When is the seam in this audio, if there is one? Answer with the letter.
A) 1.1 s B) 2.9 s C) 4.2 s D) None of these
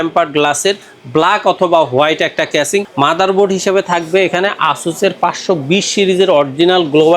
B